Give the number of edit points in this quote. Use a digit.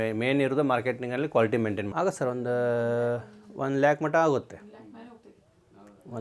1